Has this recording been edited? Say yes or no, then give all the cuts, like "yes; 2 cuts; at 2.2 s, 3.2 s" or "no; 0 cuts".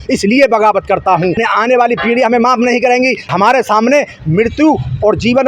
yes; 2 cuts; at 1.4 s, 3.3 s